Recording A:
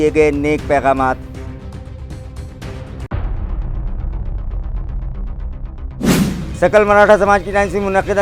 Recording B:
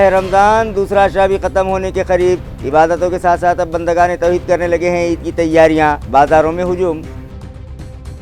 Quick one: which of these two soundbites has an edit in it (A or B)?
B